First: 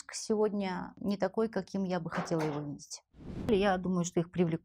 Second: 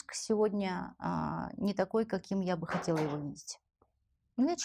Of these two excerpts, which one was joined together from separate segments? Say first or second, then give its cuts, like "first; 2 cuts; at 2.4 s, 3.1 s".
first; 2 cuts; at 0.9 s, 3.5 s